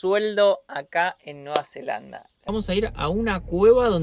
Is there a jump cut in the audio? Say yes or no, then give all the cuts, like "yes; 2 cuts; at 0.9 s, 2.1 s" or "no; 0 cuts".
yes; 1 cut; at 2.5 s